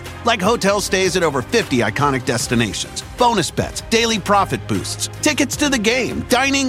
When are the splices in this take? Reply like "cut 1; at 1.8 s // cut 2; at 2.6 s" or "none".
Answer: none